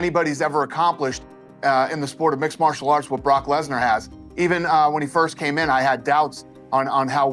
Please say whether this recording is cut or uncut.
uncut